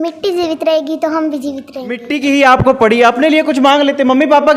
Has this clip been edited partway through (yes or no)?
yes